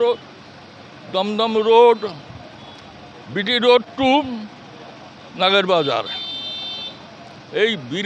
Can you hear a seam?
no; 0 cuts

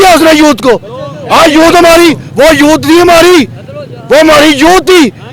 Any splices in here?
no; 0 cuts

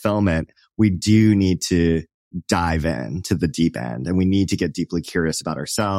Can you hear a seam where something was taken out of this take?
no; 0 cuts

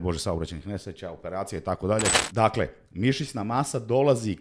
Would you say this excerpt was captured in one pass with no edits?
no; 1 cut; at 2.1 s

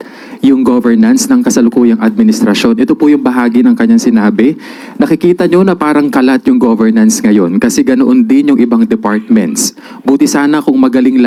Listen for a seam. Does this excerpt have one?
no; 0 cuts

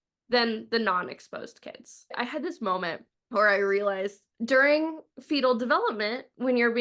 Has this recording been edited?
yes; 3 cuts; at 2.2 s, 3.1 s, 4.3 s

